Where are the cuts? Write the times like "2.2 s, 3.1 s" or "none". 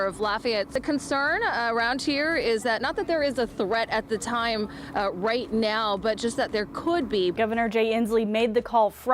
7.3 s